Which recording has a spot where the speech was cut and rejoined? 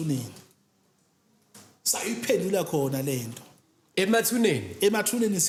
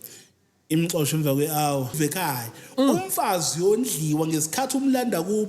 second; 1 cut; at 2.0 s

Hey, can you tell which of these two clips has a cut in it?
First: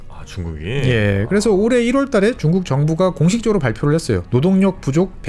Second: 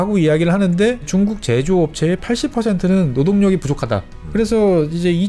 second; 1 cut; at 4.2 s

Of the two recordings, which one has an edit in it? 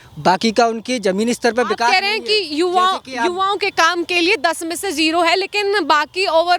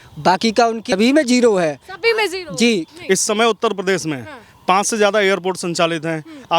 second; 1 cut; at 0.9 s

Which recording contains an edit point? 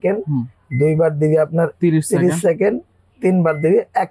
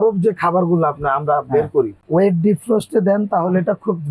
second; 1 cut; at 2.0 s

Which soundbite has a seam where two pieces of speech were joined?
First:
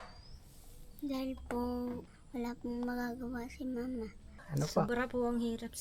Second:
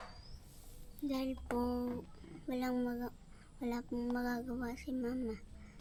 first; 2 cuts; at 2.1 s, 4.3 s

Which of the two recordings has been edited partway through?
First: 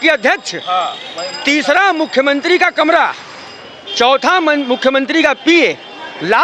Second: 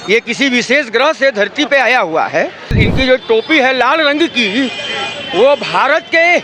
second; 1 cut; at 2.8 s

